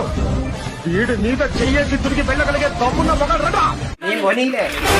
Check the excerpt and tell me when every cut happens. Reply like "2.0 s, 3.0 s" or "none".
4.0 s

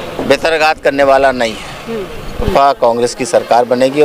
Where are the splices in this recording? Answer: 2.5 s

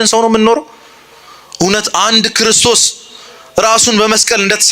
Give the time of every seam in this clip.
none

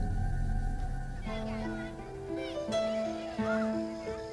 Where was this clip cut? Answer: 3.2 s

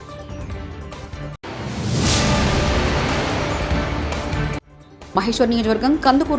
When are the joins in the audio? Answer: none

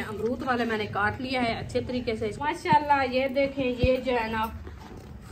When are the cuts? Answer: 2.4 s

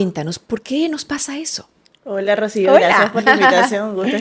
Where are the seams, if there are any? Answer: none

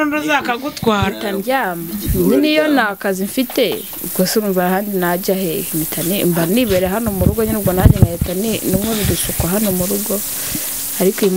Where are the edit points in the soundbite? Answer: none

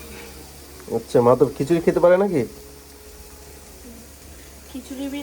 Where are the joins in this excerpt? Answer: none

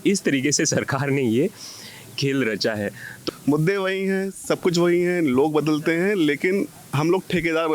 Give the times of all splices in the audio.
3.1 s, 6.8 s

